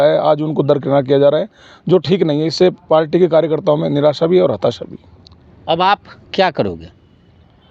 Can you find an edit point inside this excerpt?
no; 0 cuts

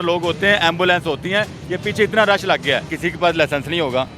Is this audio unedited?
no; 1 cut; at 3.0 s

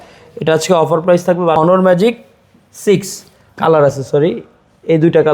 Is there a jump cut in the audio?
yes; 1 cut; at 1.6 s

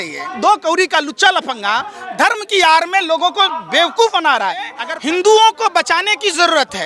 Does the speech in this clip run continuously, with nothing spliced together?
no; 1 cut; at 4.9 s

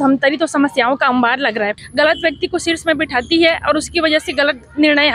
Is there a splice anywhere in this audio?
yes; 1 cut; at 1.8 s

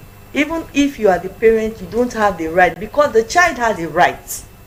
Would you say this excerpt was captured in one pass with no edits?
yes; 0 cuts

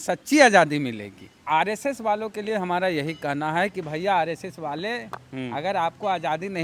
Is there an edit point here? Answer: yes; 1 cut; at 1.4 s

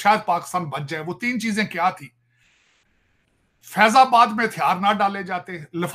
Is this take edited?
no; 0 cuts

